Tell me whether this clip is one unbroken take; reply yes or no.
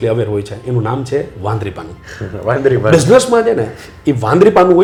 yes